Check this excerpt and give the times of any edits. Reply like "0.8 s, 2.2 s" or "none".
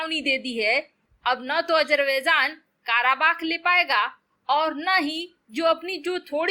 1.0 s